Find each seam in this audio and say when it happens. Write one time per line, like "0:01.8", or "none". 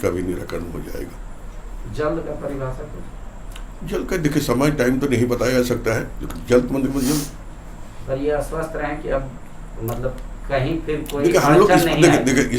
none